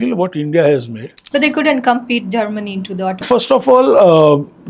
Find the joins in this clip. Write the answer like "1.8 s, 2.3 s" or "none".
1.2 s, 3.1 s

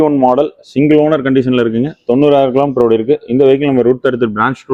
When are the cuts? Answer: none

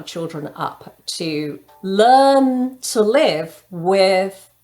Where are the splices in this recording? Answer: 1.6 s

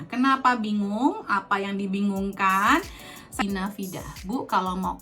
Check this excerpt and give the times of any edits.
3.5 s

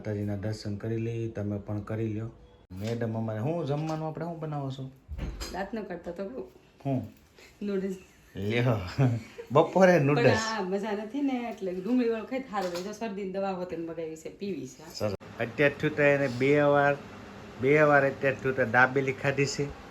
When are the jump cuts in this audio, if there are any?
2.6 s, 15.2 s

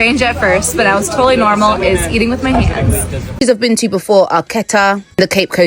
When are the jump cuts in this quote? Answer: 3.3 s

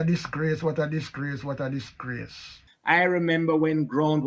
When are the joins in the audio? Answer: 2.7 s

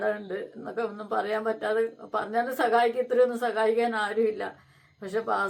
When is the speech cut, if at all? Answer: none

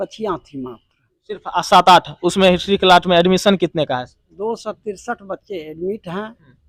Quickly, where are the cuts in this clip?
none

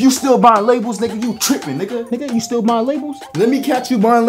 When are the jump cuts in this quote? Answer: 2.1 s, 3.3 s

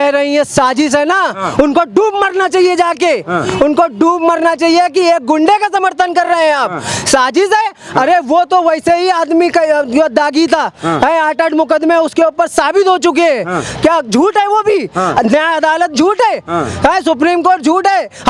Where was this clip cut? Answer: none

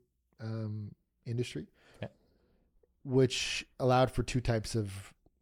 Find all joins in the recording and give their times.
none

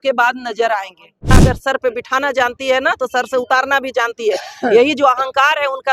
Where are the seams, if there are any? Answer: 1.3 s

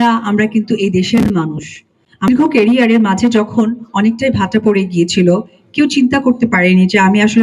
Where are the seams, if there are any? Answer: 2.3 s

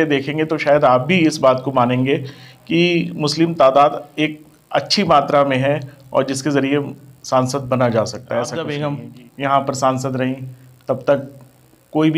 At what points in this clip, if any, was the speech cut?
8.7 s

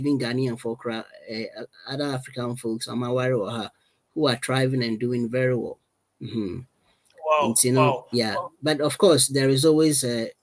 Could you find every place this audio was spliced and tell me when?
none

